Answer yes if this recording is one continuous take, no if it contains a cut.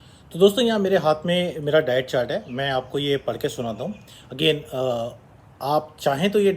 yes